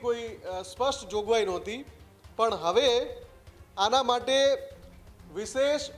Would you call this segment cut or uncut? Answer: uncut